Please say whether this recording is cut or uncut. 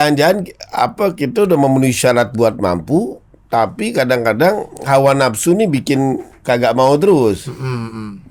uncut